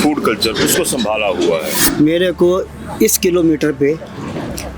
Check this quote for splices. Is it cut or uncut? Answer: cut